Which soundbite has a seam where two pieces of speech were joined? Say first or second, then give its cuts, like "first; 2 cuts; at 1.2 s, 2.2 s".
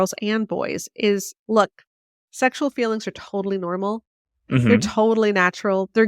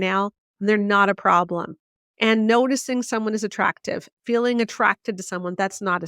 first; 1 cut; at 1.3 s